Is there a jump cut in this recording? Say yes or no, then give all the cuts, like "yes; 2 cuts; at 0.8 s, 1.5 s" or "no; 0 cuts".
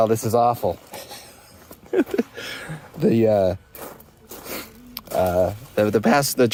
no; 0 cuts